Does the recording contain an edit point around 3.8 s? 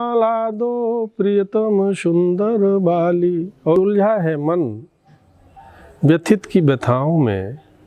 yes; 1 cut; at 3.8 s

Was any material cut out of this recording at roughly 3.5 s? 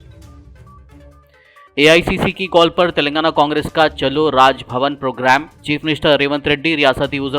no; 1 cut; at 1.1 s

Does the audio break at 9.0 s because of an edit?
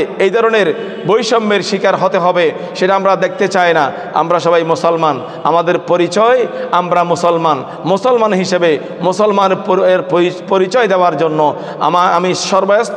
no; 0 cuts

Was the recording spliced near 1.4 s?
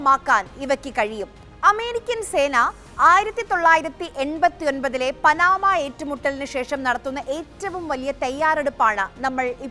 yes; 1 cut; at 1.4 s

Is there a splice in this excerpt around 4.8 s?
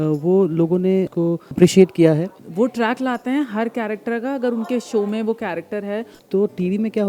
no; 2 cuts; at 2.4 s, 6.2 s

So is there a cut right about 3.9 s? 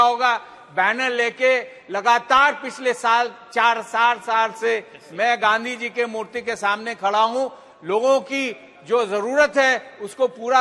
no; 0 cuts

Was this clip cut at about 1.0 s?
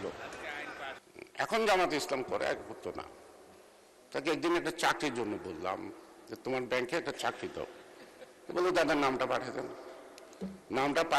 yes; 1 cut; at 1.0 s

